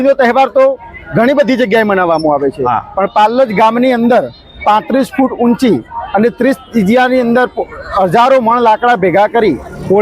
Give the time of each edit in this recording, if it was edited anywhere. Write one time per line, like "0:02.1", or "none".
none